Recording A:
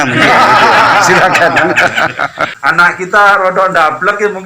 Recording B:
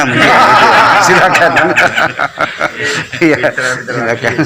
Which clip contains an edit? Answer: A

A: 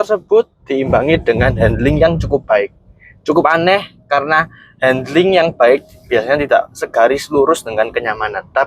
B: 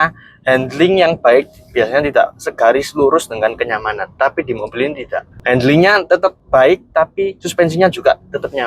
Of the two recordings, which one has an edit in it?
B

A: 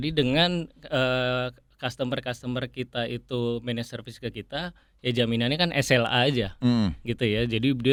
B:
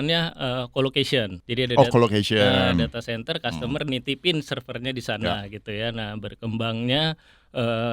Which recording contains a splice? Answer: B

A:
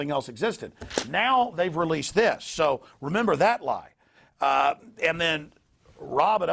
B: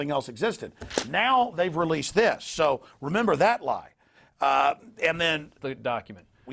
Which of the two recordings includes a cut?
A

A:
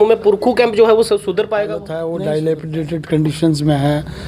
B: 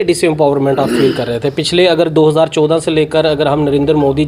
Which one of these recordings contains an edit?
A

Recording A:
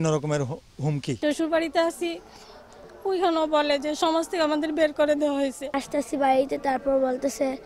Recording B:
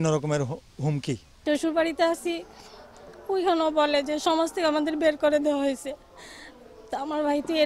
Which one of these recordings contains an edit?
A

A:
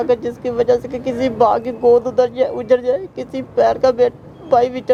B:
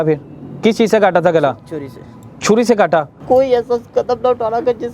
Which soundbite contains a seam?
B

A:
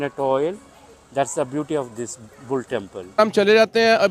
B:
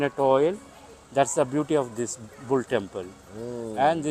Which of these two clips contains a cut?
A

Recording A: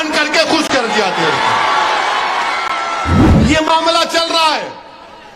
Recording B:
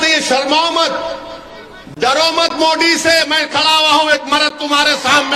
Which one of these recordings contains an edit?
A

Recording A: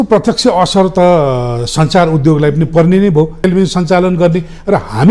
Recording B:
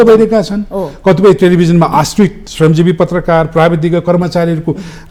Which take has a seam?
A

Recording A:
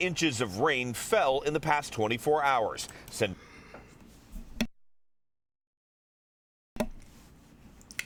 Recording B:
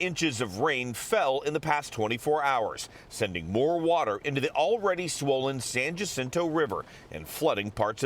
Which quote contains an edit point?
B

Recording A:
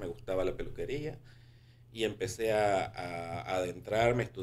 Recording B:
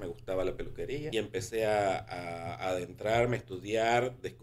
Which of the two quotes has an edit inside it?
B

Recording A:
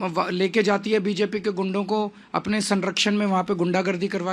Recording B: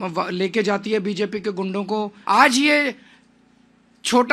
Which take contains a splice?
B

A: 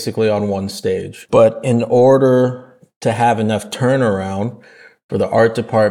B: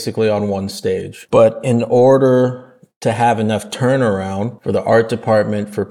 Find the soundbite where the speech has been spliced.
B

